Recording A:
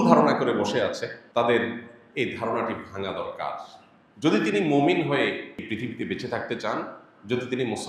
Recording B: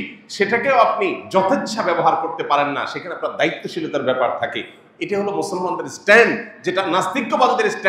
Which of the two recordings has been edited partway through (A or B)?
A